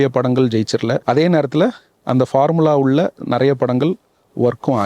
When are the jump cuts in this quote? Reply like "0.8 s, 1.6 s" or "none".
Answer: 1.0 s